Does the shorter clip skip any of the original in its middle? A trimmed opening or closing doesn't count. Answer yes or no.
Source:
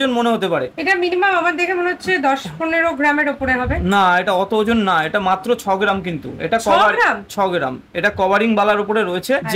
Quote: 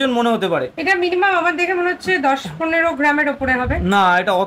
no